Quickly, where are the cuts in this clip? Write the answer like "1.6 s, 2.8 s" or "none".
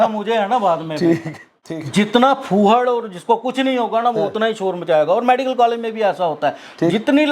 1.8 s

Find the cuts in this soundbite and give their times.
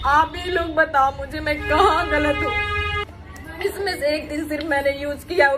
3.0 s

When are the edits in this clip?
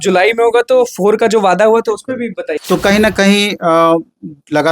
2.5 s

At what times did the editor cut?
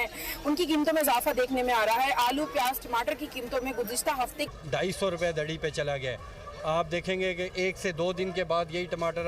4.5 s

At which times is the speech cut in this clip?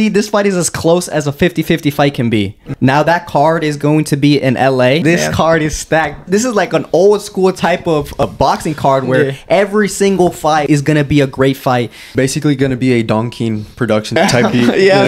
2.6 s, 5.0 s, 6.3 s, 8.2 s, 10.6 s, 12.1 s, 14.2 s

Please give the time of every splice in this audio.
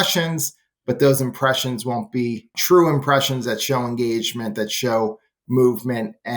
2.6 s

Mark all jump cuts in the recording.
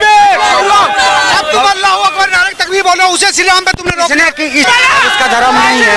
4.7 s

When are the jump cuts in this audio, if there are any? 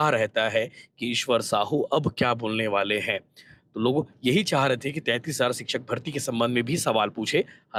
none

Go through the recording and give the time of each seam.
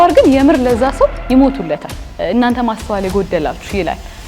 2.1 s

